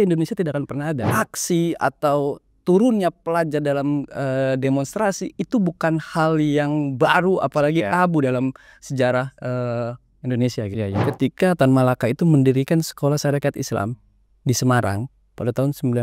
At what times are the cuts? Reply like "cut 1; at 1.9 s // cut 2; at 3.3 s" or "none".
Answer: cut 1; at 1.0 s // cut 2; at 11.0 s